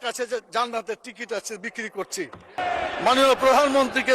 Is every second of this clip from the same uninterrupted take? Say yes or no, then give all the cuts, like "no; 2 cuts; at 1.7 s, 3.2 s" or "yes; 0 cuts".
no; 1 cut; at 2.6 s